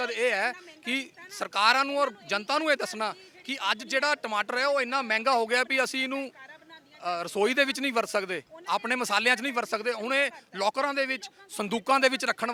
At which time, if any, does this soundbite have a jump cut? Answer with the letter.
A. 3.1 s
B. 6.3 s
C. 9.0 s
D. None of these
D